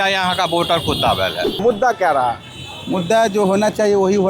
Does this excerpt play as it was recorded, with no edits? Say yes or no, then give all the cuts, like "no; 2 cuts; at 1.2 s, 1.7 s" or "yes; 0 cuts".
no; 1 cut; at 1.6 s